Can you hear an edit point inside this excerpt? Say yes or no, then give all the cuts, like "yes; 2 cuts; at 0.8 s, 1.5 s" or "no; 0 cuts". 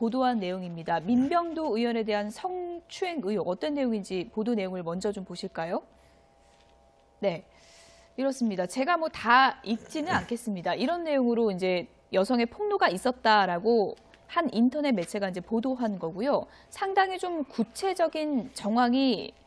yes; 1 cut; at 12.9 s